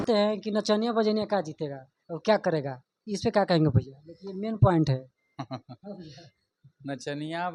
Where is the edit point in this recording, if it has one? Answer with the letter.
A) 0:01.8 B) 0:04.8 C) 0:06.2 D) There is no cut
D